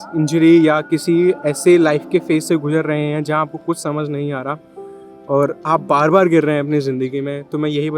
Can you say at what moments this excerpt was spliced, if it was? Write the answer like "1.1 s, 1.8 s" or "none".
none